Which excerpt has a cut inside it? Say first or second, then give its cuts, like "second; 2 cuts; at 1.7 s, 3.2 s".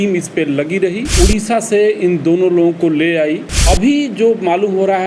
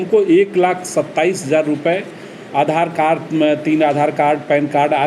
first; 2 cuts; at 1.1 s, 3.5 s